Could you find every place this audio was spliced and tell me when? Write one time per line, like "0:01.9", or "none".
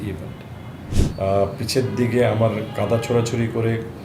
0:01.0